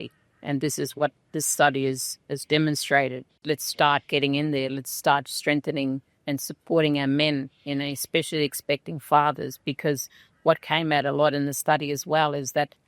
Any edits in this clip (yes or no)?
yes